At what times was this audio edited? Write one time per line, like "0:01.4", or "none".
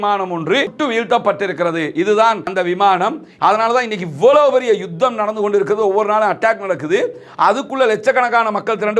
0:03.3